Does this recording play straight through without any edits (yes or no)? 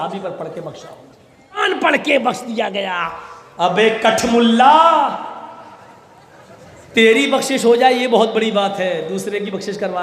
no